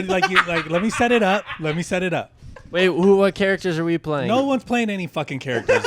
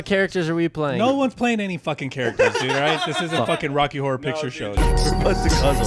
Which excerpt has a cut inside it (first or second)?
second